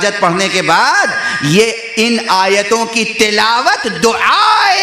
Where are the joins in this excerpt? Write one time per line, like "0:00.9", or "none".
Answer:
none

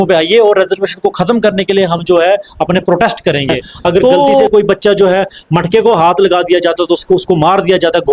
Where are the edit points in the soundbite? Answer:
0:04.4

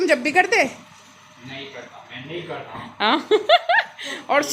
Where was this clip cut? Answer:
none

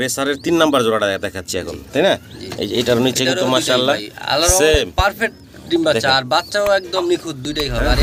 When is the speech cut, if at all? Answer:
none

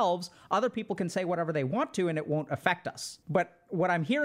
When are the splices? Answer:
0:03.1

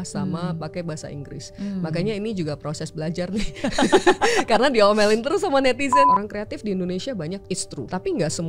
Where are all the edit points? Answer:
0:06.1
0:07.7

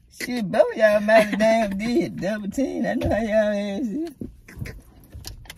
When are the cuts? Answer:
none

